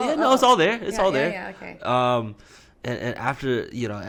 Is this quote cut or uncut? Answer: uncut